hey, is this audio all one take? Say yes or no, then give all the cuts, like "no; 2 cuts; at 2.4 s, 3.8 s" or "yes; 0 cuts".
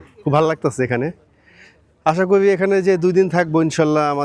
yes; 0 cuts